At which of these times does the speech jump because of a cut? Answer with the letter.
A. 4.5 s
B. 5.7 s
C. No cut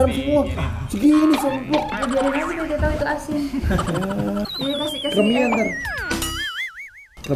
A